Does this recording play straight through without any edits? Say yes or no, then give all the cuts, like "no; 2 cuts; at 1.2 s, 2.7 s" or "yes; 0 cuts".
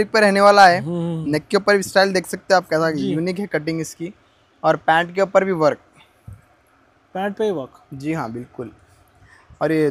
yes; 0 cuts